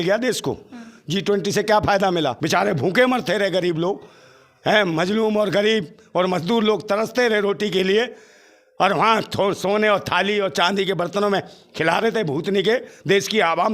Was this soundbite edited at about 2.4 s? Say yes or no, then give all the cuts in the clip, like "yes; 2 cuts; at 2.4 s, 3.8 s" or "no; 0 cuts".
yes; 1 cut; at 2.4 s